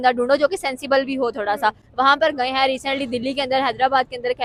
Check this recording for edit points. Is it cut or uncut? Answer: uncut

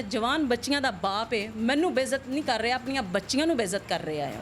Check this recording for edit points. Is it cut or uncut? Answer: uncut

